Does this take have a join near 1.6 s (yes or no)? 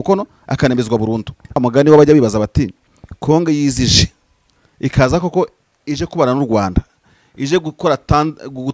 yes